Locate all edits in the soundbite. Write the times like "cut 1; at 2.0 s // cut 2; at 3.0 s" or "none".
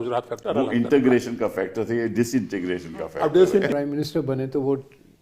cut 1; at 3.7 s